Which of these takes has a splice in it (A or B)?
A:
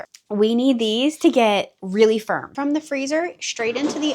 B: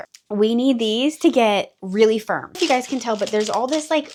A